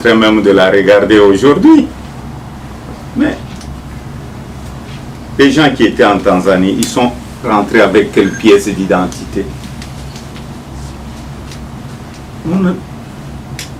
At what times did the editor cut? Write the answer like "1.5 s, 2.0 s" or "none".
none